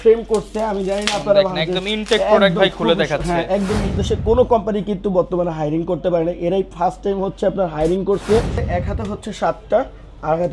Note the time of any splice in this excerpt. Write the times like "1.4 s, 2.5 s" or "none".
4.0 s, 8.6 s